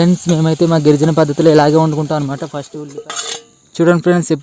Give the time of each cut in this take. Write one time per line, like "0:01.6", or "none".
0:02.6